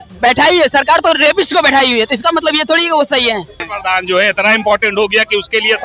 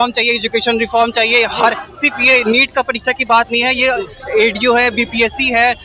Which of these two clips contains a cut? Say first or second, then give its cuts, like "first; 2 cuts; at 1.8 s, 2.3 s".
first; 1 cut; at 3.6 s